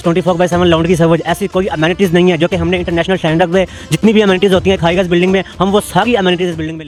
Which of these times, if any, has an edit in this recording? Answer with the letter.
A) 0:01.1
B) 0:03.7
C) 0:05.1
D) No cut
D